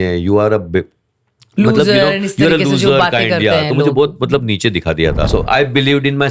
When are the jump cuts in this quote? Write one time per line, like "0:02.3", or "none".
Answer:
0:05.3

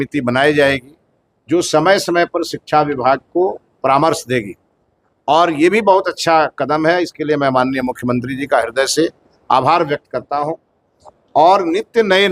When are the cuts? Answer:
none

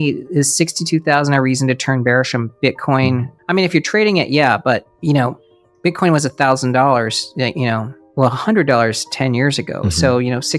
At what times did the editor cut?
0:03.3
0:08.0

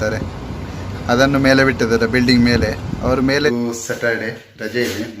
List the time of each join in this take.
0:03.5

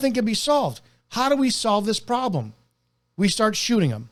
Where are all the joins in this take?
none

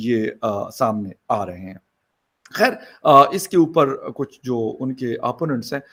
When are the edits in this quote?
none

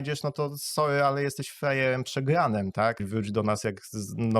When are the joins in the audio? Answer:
0:03.0

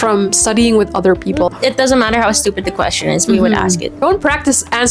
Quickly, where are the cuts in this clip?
0:01.5
0:03.9

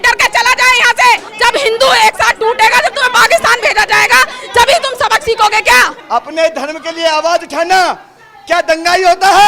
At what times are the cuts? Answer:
0:01.3
0:06.0

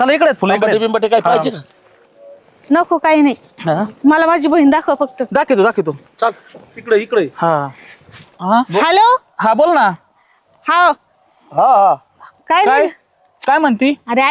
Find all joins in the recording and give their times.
0:08.4

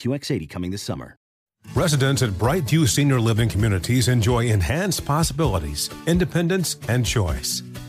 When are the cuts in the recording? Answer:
0:01.3

